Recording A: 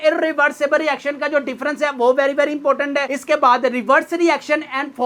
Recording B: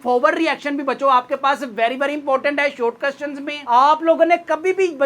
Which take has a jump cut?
B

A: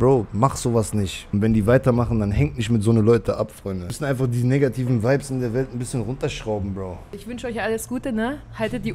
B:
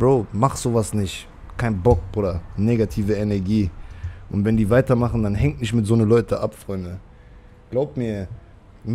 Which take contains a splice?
A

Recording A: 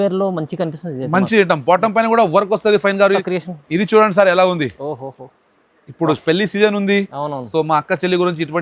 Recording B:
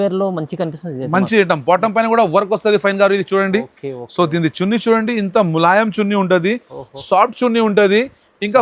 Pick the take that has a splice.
A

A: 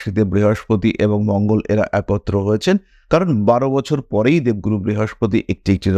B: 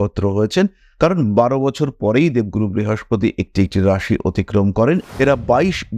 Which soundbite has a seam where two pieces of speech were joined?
B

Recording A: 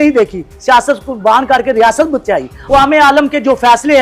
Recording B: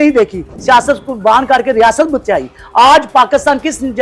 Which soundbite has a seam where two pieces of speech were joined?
A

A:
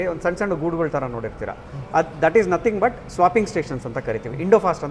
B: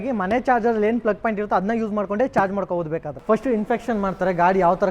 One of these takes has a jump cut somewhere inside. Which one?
B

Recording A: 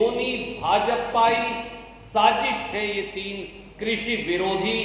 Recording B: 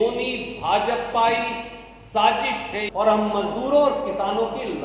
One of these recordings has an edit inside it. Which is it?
B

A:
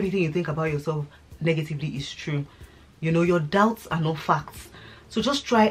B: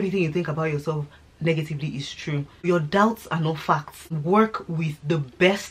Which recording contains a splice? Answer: B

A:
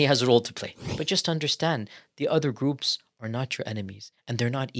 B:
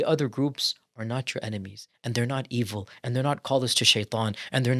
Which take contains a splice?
A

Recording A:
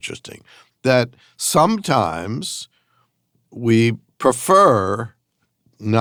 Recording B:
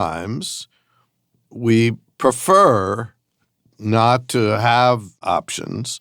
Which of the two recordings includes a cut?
B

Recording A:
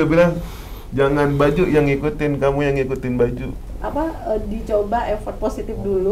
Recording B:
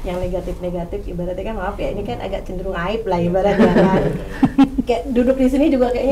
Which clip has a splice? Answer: A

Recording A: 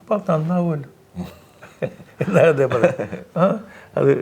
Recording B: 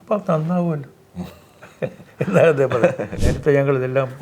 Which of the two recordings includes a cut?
B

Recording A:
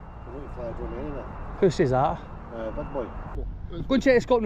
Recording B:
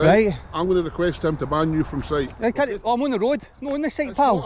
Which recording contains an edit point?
A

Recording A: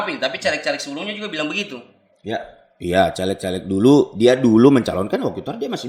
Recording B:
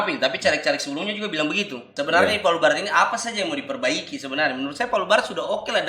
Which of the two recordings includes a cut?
B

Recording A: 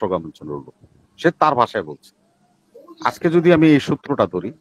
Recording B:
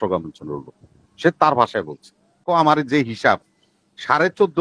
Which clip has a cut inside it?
B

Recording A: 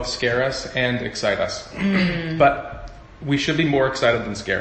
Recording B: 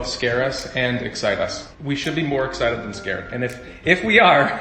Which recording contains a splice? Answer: B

